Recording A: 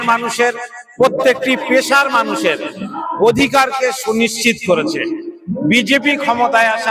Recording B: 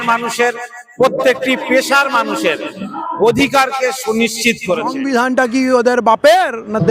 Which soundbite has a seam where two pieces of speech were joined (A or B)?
B